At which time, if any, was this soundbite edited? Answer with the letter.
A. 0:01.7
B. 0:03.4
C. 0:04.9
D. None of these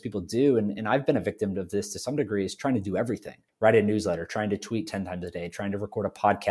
B